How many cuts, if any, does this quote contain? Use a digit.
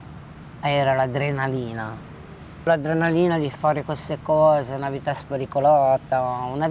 1